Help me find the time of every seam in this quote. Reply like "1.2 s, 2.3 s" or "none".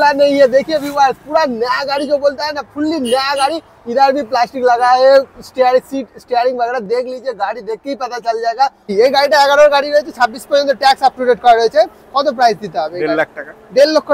8.9 s